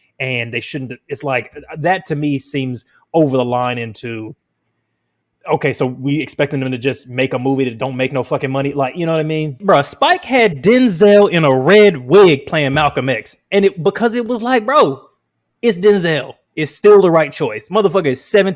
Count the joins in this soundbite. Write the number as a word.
one